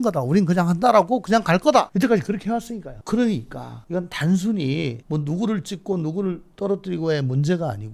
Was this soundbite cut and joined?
no; 0 cuts

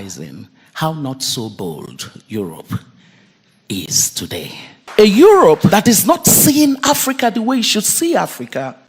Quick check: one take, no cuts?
no; 2 cuts; at 4.9 s, 5.7 s

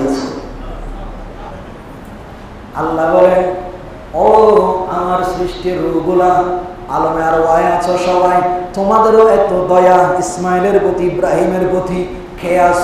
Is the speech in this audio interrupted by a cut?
yes; 1 cut; at 1.5 s

